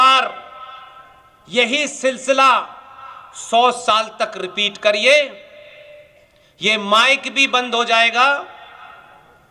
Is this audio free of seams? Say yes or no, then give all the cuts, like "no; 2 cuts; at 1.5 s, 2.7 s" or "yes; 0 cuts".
yes; 0 cuts